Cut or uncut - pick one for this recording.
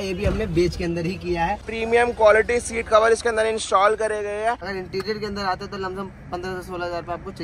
cut